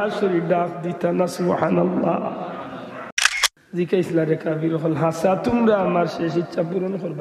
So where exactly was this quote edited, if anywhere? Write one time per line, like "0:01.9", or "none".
0:03.1